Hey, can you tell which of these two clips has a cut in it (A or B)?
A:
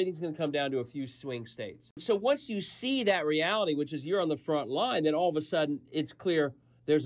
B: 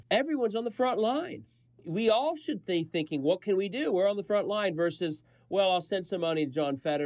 A